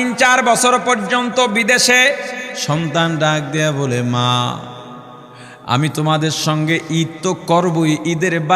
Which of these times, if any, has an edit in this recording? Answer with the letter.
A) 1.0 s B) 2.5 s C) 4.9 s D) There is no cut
B